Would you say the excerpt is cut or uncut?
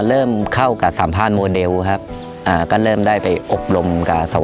uncut